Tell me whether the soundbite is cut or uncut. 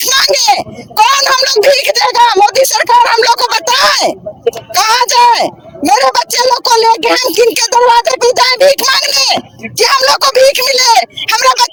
uncut